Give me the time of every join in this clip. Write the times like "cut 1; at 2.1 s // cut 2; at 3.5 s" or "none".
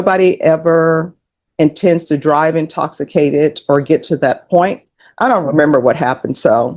cut 1; at 4.8 s